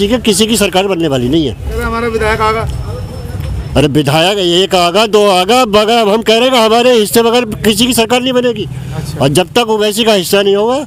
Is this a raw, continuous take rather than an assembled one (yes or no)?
yes